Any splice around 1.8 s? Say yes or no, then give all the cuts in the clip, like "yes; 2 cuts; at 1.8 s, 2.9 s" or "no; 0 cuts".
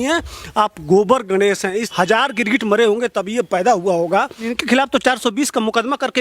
yes; 2 cuts; at 1.8 s, 4.5 s